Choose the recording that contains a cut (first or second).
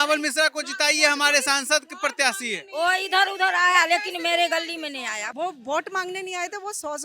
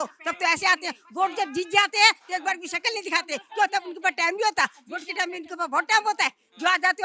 first